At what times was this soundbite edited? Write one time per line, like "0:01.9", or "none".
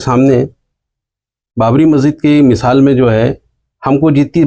none